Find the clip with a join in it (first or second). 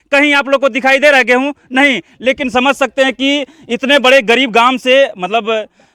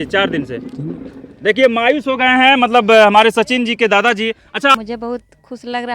second